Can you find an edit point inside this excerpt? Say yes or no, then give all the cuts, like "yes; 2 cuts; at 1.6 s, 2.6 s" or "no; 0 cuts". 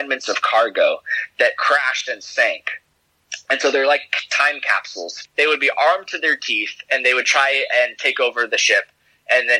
yes; 1 cut; at 5.1 s